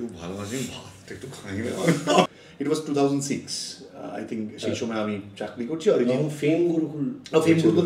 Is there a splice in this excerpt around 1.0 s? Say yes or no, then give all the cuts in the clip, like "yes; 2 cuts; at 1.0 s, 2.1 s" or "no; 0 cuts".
no; 1 cut; at 2.3 s